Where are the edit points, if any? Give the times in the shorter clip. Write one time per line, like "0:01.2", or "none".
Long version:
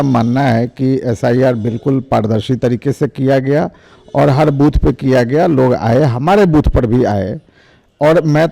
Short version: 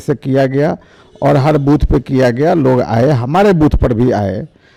none